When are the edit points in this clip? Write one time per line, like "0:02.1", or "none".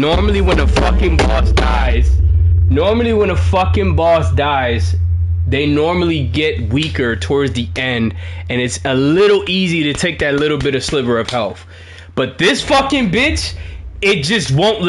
none